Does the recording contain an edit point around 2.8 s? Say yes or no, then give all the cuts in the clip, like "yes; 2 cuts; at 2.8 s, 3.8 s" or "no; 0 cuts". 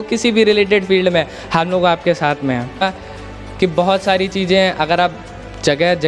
yes; 1 cut; at 2.8 s